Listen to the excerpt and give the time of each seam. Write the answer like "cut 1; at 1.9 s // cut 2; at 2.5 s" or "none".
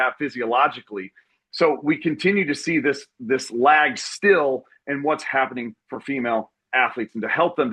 none